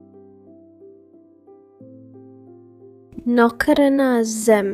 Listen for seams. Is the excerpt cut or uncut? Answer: cut